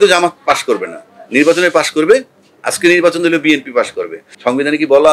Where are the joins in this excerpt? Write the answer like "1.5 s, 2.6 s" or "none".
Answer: 4.2 s